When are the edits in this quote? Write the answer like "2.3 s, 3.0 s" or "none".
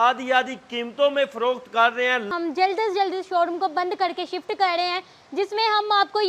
2.3 s